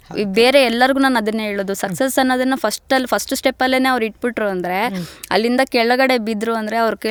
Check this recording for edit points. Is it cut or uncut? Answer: uncut